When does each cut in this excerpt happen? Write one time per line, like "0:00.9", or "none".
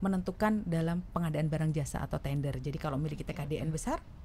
none